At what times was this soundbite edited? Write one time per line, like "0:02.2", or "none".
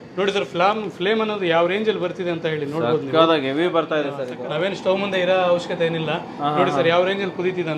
0:04.2